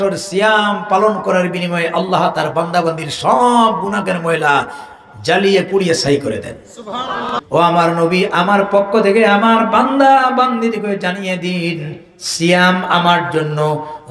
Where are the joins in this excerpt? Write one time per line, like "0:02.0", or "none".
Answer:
0:07.2